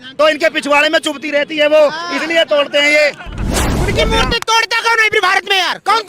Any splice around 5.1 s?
no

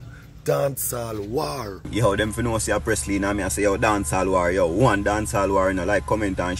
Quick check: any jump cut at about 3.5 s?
no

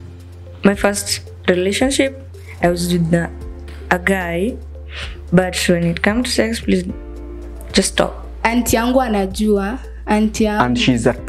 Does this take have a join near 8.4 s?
yes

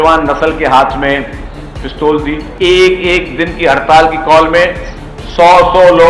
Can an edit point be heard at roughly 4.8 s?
no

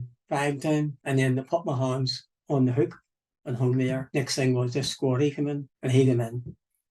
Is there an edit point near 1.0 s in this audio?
yes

